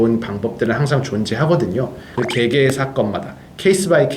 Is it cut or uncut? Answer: cut